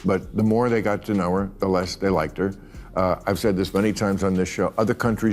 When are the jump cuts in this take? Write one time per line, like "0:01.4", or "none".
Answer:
0:02.6